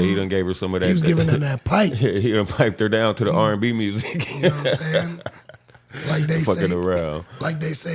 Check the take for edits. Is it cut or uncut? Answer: uncut